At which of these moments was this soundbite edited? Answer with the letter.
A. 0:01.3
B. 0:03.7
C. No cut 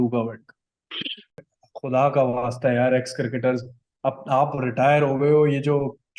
A